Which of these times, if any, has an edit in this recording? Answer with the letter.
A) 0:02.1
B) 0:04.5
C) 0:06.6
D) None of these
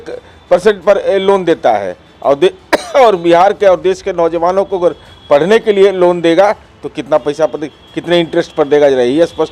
D